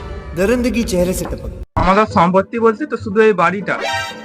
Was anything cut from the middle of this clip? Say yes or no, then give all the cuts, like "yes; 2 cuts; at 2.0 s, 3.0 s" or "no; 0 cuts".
yes; 1 cut; at 1.6 s